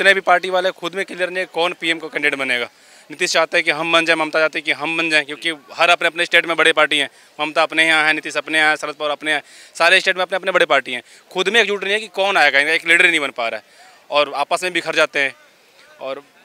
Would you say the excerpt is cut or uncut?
uncut